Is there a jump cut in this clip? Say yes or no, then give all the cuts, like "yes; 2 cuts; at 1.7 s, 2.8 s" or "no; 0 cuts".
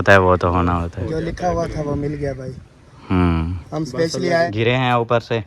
yes; 1 cut; at 4.5 s